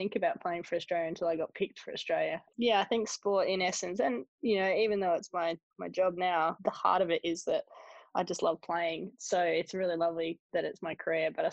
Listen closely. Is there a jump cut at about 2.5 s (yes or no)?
yes